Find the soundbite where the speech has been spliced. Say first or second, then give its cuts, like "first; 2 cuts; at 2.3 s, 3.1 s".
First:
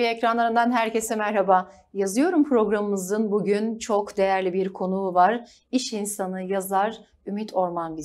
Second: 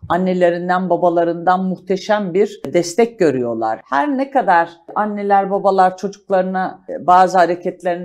second; 4 cuts; at 2.7 s, 3.8 s, 4.9 s, 6.9 s